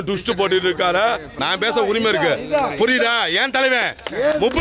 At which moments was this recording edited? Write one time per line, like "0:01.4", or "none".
0:01.3